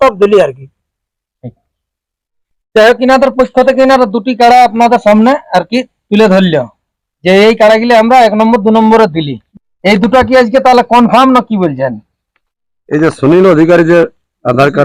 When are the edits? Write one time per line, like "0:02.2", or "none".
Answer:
none